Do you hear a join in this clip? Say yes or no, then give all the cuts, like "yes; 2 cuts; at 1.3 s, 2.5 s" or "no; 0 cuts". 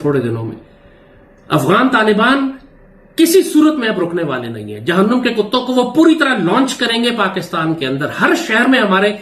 no; 0 cuts